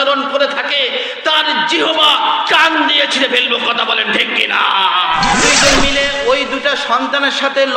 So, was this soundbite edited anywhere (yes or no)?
yes